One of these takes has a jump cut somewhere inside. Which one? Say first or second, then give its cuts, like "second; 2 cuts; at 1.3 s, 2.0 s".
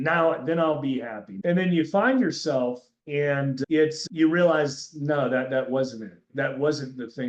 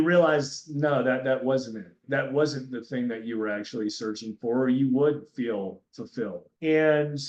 first; 2 cuts; at 1.2 s, 2.9 s